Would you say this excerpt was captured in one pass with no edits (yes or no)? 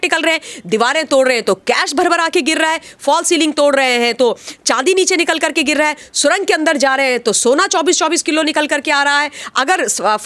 yes